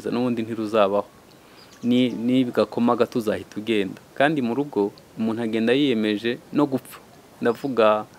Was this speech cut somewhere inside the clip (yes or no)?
no